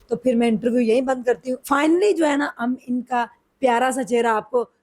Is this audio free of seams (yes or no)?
no